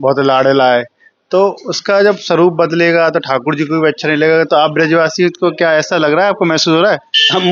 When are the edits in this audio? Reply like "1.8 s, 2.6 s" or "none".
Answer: none